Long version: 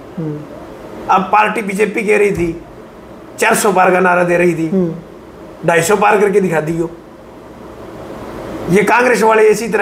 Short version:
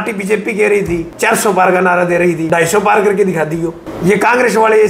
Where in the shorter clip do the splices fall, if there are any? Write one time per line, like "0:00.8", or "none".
0:01.1
0:02.4
0:03.9

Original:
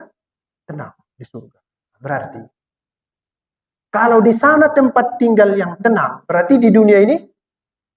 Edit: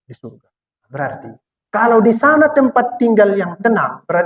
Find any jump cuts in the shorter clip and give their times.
0:01.5

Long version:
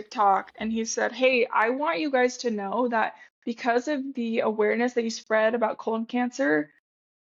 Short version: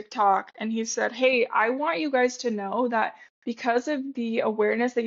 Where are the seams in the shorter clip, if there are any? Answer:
none

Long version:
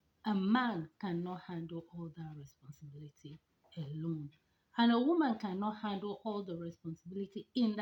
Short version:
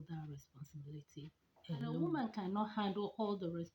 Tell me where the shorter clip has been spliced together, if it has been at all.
0:02.0

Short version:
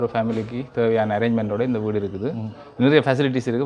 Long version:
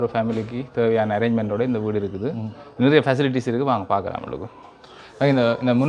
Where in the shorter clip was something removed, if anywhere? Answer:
none

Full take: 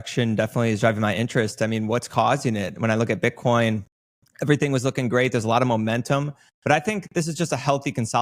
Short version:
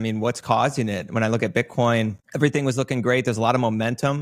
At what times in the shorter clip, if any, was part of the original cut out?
0:02.2

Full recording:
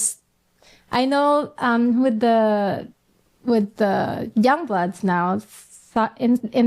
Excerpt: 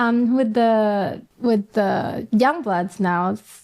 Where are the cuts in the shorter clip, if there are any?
0:01.2

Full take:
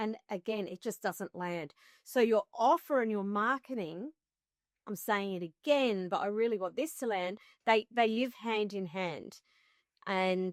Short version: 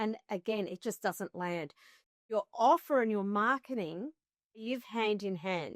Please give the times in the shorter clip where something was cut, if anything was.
0:04.7

